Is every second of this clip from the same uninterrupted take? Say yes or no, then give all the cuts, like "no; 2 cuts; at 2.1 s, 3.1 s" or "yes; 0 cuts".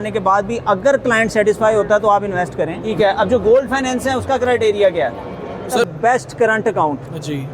no; 2 cuts; at 2.9 s, 5.9 s